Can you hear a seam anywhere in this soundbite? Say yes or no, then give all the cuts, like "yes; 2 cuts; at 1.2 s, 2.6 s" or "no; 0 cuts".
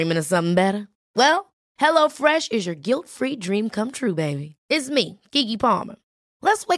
no; 0 cuts